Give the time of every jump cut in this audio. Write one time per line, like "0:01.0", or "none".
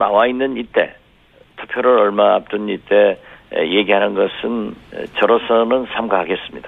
none